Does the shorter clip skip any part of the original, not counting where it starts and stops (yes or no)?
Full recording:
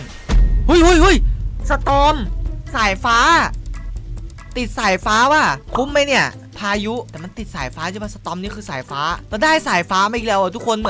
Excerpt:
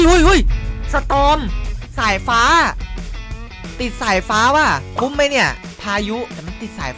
no